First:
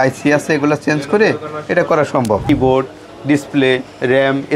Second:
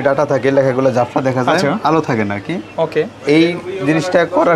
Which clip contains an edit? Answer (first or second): first